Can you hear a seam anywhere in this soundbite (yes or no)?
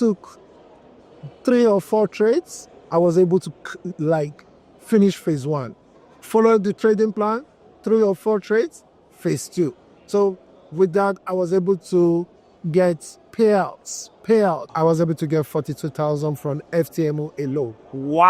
yes